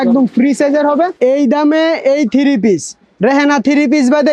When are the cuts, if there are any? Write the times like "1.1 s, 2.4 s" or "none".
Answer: 1.1 s